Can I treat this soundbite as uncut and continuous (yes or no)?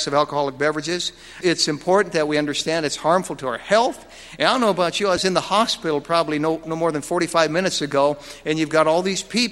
no